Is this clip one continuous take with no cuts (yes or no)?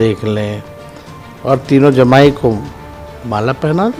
yes